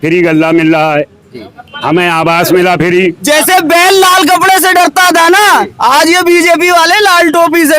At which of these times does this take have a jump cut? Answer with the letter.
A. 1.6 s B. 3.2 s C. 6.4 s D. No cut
B